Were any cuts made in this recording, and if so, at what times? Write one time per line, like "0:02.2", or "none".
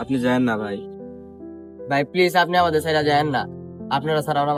none